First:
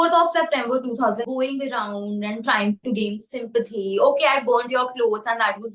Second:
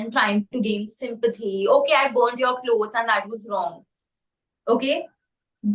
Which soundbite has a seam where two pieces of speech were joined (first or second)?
first